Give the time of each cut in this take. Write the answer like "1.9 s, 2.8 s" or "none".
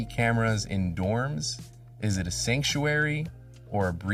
none